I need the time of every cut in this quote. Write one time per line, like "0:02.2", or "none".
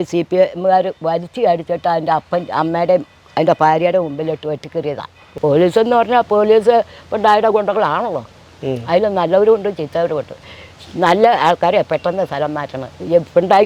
0:05.2